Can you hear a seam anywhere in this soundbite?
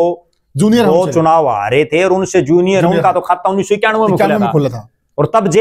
no; 0 cuts

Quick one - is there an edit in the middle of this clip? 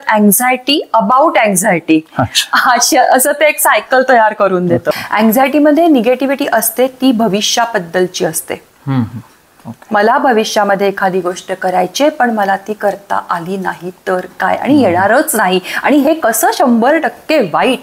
yes; 1 cut; at 4.9 s

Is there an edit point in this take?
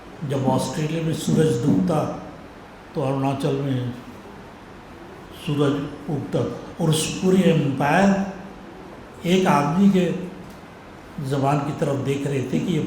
yes; 1 cut; at 6.6 s

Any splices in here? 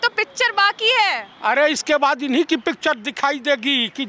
no; 0 cuts

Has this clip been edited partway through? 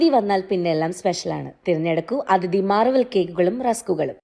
no; 0 cuts

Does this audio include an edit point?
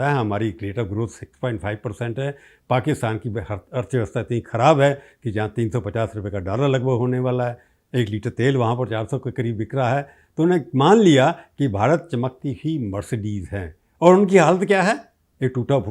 no; 0 cuts

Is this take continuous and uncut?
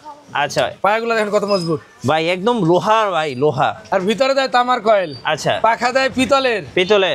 no; 1 cut; at 3.8 s

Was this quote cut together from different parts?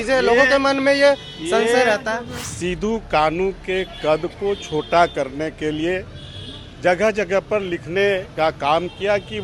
yes; 1 cut; at 2.3 s

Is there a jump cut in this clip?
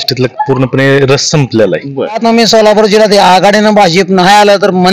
yes; 1 cut; at 2.2 s

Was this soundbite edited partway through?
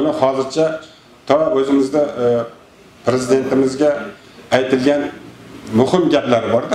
no; 0 cuts

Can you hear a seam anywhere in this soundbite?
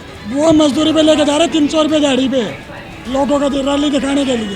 no; 0 cuts

